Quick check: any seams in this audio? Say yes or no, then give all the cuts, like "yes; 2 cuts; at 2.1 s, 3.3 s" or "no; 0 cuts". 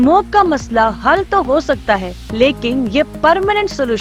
no; 0 cuts